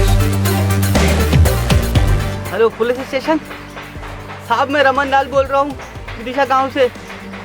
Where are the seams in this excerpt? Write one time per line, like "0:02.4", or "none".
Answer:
0:02.3